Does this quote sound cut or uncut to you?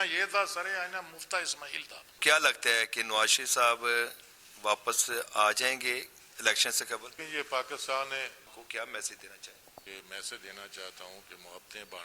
cut